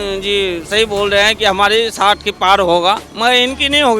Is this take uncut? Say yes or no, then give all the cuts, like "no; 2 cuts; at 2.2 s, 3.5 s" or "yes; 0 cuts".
no; 1 cut; at 3.1 s